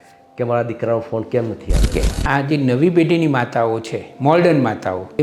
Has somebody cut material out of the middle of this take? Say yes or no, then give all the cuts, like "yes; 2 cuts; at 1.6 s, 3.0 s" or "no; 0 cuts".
yes; 1 cut; at 1.9 s